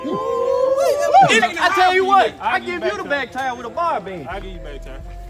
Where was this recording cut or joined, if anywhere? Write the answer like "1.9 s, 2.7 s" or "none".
1.4 s